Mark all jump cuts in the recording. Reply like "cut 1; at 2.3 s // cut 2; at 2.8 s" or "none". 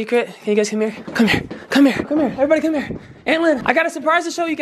cut 1; at 1.0 s // cut 2; at 2.1 s // cut 3; at 3.6 s